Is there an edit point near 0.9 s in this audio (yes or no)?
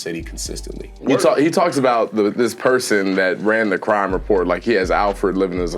yes